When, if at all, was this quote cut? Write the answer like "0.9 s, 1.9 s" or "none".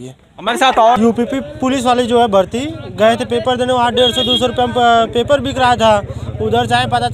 1.0 s